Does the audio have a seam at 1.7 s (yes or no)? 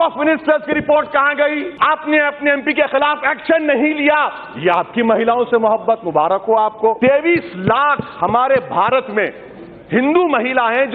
yes